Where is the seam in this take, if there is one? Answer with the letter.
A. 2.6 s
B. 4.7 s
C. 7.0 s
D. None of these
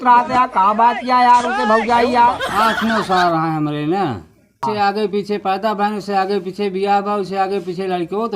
B